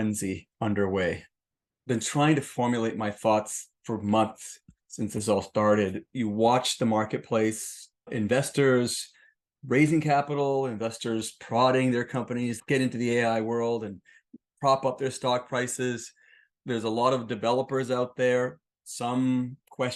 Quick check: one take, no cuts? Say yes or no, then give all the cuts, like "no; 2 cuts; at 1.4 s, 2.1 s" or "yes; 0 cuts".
yes; 0 cuts